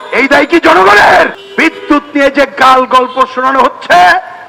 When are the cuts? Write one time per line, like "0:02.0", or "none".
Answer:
0:01.4